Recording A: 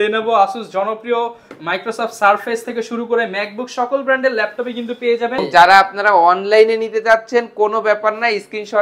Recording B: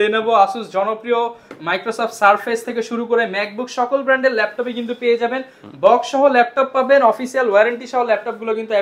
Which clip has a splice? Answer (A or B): A